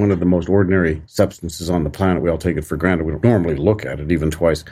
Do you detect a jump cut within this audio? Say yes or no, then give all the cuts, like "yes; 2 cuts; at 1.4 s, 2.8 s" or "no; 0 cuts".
yes; 2 cuts; at 1.0 s, 3.1 s